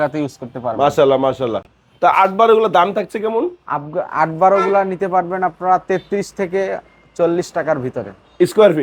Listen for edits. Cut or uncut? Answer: uncut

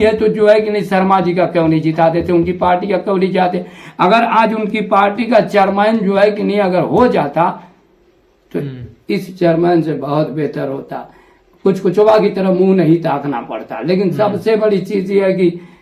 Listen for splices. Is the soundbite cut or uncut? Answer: uncut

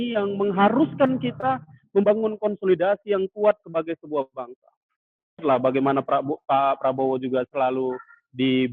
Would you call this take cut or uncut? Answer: cut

